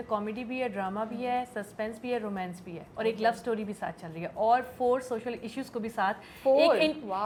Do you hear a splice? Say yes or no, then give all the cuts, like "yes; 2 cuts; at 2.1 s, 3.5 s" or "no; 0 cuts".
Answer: no; 0 cuts